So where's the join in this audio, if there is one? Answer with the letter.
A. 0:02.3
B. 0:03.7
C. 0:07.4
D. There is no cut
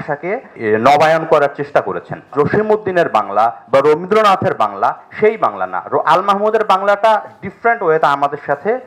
A